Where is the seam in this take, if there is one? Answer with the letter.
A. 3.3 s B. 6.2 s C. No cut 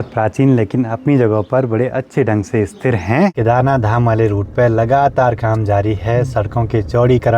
A